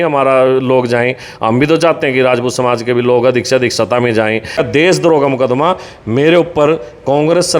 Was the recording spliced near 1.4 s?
no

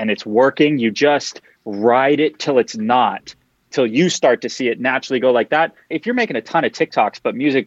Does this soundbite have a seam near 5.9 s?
yes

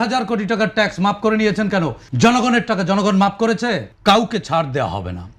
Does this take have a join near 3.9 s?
yes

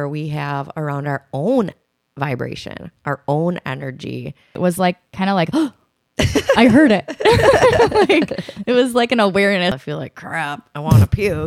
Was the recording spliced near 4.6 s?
yes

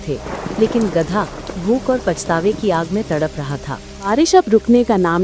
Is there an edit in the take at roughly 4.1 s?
yes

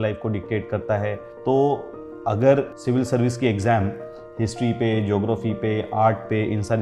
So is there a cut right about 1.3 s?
yes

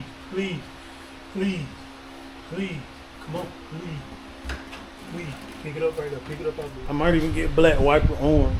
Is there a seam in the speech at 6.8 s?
yes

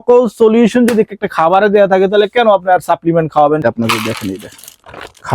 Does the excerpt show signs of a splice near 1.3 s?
no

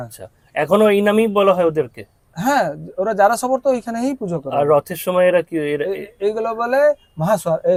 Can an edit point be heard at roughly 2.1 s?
no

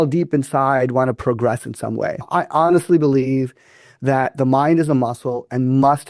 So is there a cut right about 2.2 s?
yes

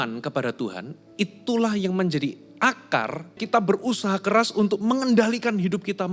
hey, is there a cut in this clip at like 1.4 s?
no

